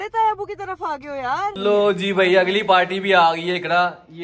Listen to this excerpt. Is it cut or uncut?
cut